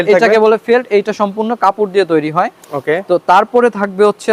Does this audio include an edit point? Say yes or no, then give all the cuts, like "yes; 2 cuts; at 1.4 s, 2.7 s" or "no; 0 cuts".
no; 0 cuts